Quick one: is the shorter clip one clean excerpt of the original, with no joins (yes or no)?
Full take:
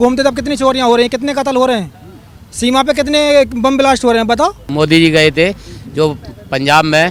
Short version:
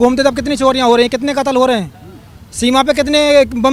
yes